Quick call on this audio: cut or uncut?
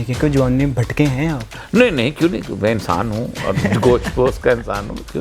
cut